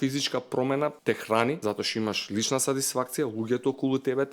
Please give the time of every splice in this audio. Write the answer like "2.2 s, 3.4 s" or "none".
1.0 s, 1.6 s